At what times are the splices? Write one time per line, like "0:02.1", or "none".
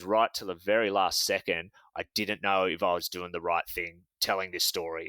0:04.1